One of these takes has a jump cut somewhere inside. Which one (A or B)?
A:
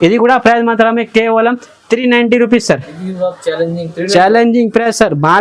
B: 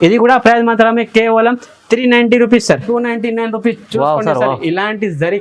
B